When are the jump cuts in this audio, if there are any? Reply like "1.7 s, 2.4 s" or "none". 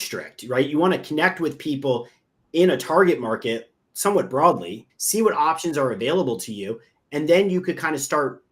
4.8 s